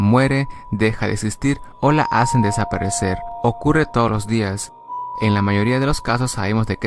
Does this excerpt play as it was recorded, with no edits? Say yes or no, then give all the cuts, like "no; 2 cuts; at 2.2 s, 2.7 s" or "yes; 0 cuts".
no; 1 cut; at 5.1 s